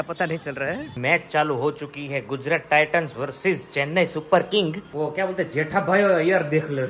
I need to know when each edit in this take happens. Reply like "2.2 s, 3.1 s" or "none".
0.9 s, 4.8 s